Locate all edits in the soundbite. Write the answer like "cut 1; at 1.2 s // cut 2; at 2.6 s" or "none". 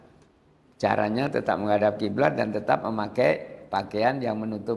none